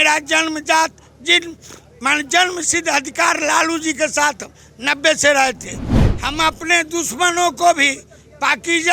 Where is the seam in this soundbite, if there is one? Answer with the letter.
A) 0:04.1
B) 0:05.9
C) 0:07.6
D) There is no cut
B